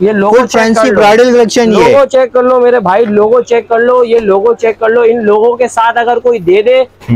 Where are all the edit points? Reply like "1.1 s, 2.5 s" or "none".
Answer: none